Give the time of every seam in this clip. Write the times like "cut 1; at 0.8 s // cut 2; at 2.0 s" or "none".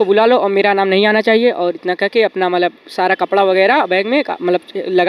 none